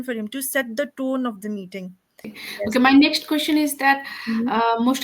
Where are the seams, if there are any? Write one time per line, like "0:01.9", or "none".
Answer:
0:02.4